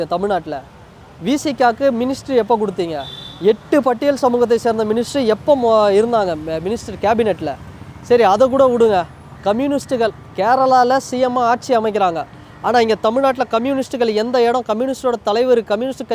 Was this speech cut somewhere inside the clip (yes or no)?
no